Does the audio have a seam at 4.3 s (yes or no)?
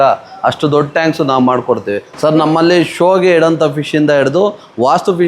no